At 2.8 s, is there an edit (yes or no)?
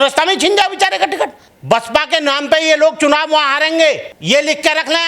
no